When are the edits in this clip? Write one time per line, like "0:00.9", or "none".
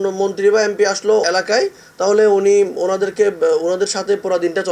0:01.2